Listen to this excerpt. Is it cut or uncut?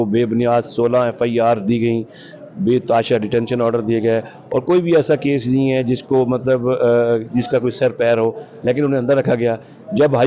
uncut